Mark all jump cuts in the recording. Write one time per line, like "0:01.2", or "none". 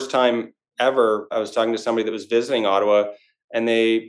0:01.3

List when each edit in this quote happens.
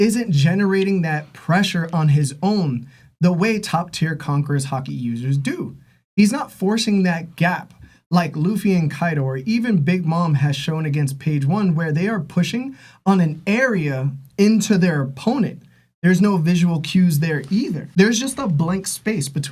none

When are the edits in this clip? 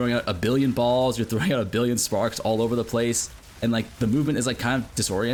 none

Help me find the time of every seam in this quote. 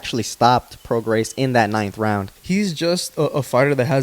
0:02.3

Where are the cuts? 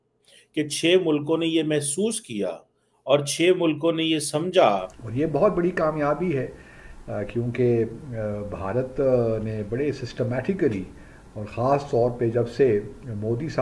0:05.0

